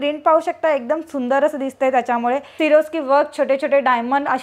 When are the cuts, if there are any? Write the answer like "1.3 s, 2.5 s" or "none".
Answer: 2.5 s